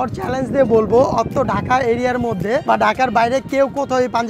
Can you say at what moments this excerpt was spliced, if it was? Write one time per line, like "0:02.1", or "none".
0:02.6